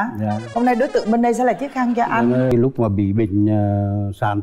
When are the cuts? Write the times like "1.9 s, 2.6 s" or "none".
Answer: 2.5 s